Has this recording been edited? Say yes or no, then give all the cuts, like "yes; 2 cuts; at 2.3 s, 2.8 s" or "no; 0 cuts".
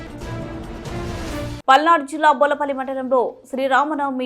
yes; 1 cut; at 1.5 s